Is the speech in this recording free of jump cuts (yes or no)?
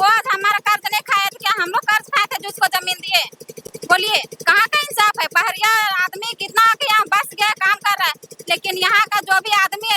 yes